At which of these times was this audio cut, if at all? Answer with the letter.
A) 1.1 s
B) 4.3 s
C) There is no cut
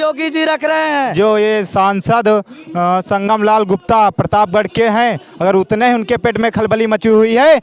A